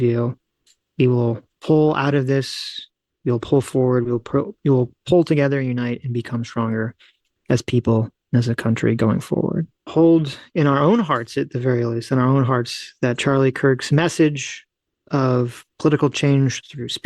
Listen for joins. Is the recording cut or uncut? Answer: cut